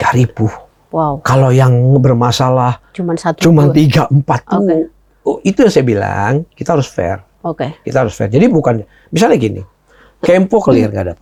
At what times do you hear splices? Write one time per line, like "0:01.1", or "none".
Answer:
none